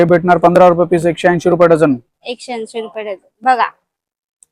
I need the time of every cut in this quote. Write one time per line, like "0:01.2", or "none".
none